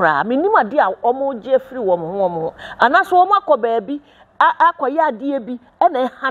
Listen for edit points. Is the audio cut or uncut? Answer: uncut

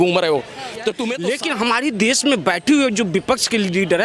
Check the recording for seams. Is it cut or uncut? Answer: cut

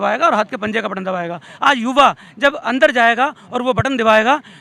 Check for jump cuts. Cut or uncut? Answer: uncut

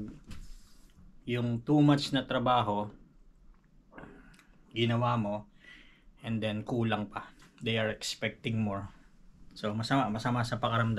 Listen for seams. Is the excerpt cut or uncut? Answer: uncut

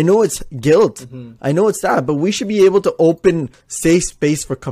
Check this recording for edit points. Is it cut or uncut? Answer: cut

